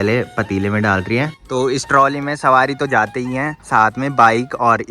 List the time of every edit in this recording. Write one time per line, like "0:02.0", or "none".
0:01.4